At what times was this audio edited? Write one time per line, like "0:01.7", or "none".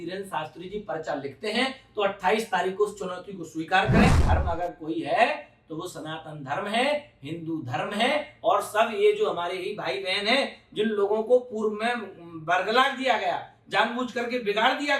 0:04.2